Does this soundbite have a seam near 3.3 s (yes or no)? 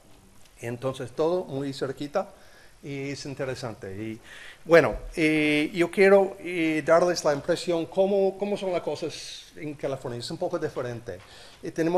no